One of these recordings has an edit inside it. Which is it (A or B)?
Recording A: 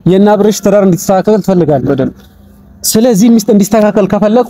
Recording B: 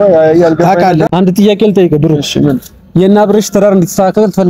B